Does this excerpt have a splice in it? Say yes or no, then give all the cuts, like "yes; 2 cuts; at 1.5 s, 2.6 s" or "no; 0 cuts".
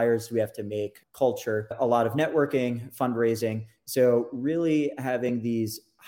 yes; 2 cuts; at 1.0 s, 1.8 s